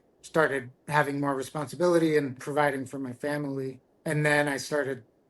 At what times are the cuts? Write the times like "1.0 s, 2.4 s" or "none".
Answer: 2.4 s, 3.9 s